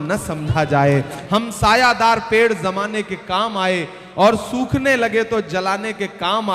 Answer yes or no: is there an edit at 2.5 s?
no